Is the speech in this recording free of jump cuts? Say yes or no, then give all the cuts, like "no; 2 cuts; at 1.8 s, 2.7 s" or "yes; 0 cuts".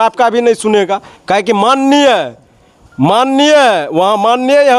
yes; 0 cuts